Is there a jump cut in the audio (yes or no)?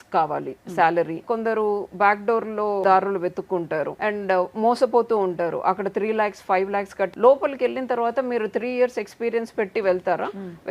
yes